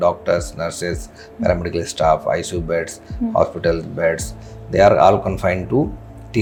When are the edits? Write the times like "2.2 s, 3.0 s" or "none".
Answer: none

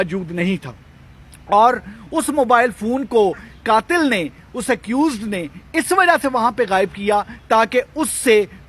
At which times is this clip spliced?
none

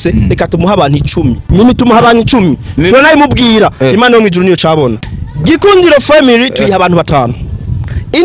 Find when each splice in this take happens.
1.4 s, 5.0 s

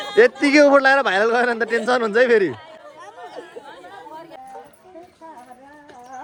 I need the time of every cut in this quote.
none

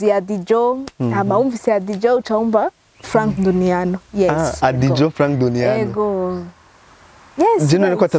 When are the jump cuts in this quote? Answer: none

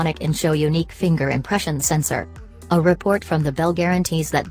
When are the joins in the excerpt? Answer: none

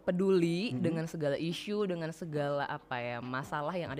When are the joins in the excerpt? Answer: none

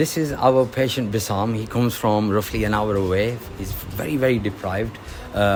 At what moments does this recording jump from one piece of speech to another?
none

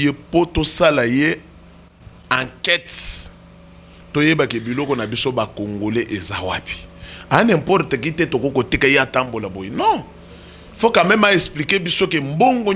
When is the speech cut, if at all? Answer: none

